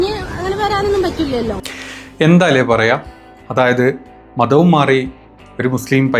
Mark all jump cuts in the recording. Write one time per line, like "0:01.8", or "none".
0:01.7